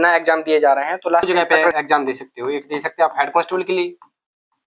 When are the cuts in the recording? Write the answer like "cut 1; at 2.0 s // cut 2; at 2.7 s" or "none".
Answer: cut 1; at 1.3 s